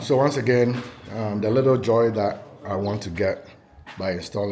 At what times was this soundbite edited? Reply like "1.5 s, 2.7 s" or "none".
none